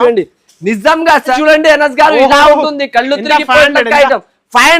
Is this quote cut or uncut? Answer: cut